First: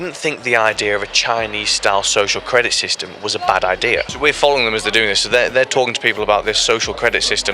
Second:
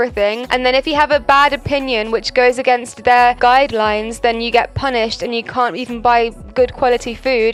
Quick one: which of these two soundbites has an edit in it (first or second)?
first